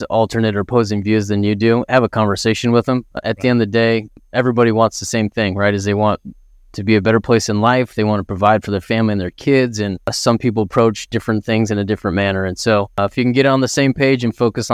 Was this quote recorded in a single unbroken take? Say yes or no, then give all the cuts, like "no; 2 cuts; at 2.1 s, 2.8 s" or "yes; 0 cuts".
no; 2 cuts; at 3.2 s, 10.1 s